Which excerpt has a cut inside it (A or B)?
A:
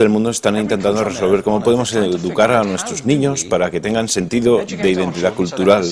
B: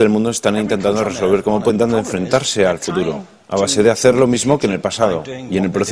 A